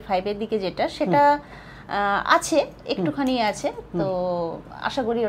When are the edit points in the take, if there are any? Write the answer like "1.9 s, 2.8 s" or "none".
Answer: none